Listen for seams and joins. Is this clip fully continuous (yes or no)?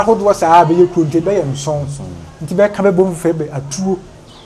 yes